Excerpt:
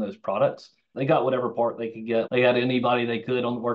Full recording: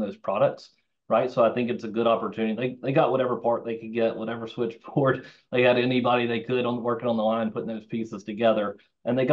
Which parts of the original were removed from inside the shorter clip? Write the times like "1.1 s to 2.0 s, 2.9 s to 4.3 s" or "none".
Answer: 0.9 s to 2.8 s, 4.1 s to 5.5 s